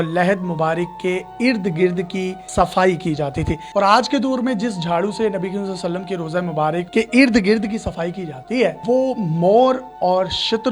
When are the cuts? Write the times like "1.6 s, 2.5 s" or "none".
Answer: 3.6 s, 6.9 s, 8.8 s